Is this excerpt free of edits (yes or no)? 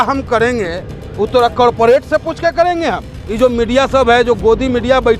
no